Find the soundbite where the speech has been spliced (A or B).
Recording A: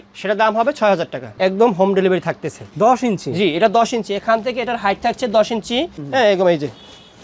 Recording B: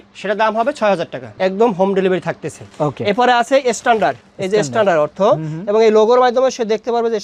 A